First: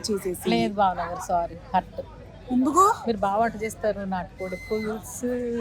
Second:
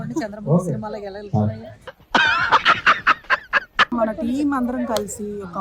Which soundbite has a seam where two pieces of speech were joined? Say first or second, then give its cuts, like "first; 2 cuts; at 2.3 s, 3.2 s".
second; 1 cut; at 3.9 s